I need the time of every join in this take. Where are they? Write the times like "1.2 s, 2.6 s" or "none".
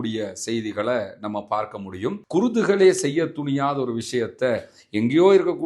2.2 s